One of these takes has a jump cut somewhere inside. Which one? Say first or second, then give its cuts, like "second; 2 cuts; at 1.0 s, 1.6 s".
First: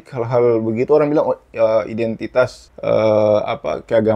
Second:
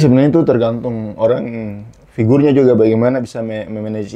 first; 1 cut; at 2.7 s